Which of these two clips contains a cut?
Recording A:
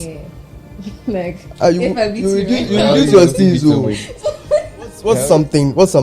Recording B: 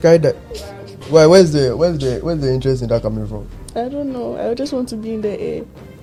A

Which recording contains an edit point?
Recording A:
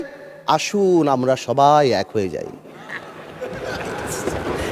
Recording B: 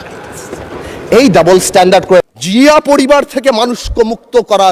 B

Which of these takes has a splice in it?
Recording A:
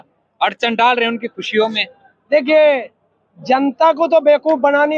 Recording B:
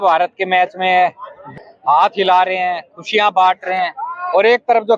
B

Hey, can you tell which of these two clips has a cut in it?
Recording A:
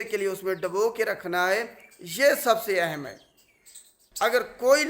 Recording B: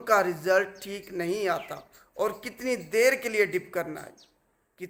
A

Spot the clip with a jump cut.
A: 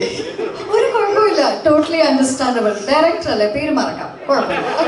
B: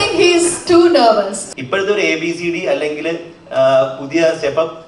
B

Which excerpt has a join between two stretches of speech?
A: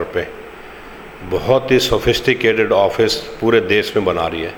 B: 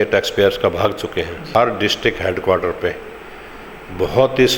B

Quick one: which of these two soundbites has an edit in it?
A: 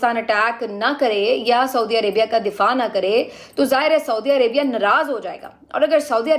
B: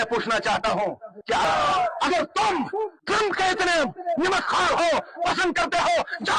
B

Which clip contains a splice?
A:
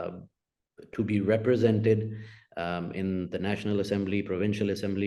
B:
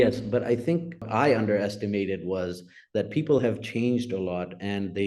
B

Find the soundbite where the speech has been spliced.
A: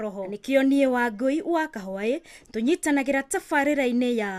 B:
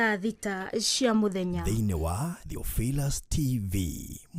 B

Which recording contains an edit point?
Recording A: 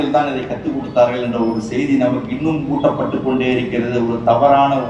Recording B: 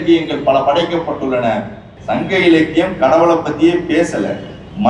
B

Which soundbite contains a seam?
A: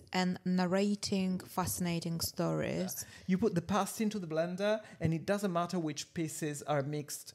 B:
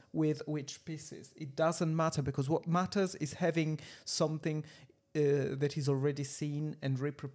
A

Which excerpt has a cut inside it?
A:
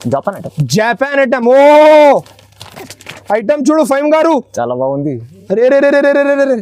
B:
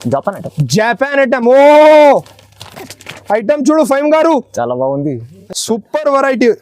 B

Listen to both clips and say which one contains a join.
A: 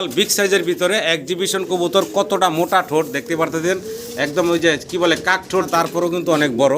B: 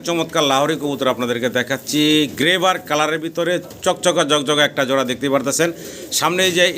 A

